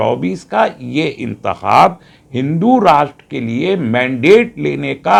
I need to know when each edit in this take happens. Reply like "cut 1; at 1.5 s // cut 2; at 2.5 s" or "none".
none